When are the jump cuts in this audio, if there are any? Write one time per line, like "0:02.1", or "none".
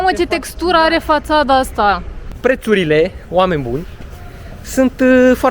0:02.2